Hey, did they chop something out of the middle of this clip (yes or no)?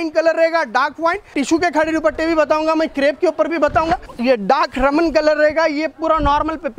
yes